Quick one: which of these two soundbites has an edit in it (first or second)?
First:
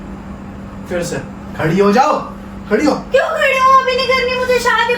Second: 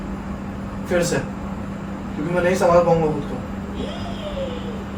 first